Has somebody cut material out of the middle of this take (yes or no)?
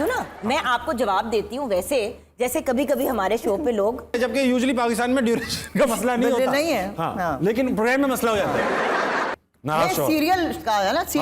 yes